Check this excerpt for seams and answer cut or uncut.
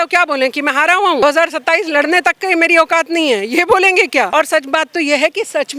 cut